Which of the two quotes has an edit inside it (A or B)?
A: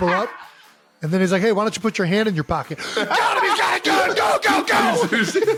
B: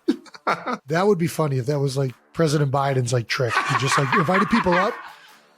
B